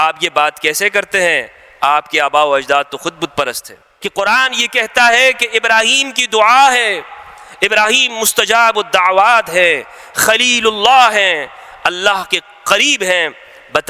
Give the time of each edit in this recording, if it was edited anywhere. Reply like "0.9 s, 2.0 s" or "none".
3.9 s